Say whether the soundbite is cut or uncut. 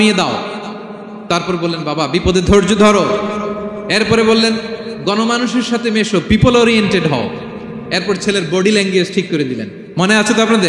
uncut